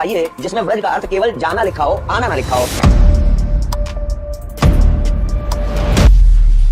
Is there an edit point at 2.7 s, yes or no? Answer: yes